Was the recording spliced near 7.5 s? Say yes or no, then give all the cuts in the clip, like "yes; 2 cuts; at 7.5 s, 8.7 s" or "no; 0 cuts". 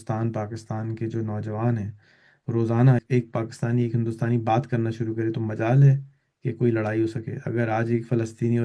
no; 1 cut; at 3.0 s